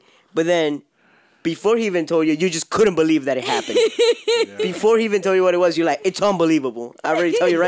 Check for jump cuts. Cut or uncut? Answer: uncut